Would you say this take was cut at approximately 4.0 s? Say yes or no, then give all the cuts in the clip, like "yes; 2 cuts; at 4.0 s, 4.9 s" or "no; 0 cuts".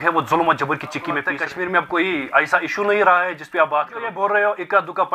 yes; 2 cuts; at 1.2 s, 4.0 s